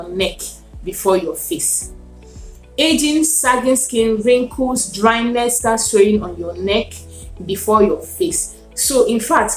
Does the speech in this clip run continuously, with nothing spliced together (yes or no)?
yes